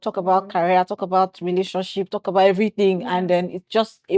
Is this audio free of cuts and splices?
yes; 0 cuts

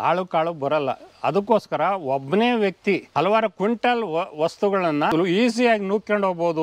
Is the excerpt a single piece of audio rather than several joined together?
no; 2 cuts; at 3.1 s, 5.1 s

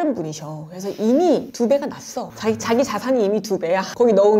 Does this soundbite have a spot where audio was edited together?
yes; 1 cut; at 1.7 s

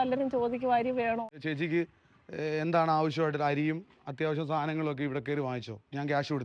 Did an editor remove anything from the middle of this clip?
yes; 1 cut; at 1.3 s

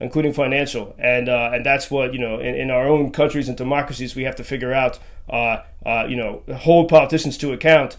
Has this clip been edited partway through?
no; 0 cuts

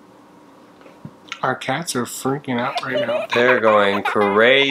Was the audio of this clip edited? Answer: yes; 1 cut; at 1.2 s

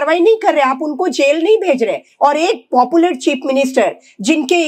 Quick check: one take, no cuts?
yes; 0 cuts

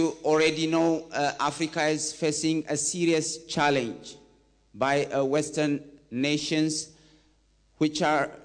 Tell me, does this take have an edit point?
no; 0 cuts

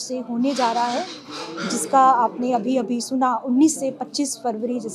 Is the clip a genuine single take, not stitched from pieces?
yes; 0 cuts

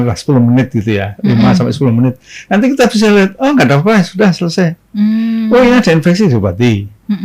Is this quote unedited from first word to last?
yes; 0 cuts

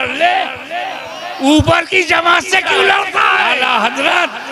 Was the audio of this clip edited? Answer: yes; 1 cut; at 3.5 s

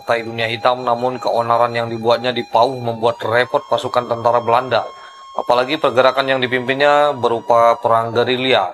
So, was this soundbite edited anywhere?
no; 0 cuts

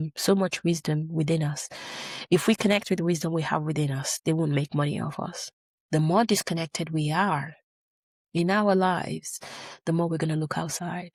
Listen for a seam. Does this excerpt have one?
no; 0 cuts

